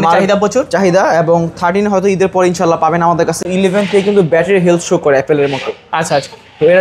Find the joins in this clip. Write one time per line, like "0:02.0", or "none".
0:03.4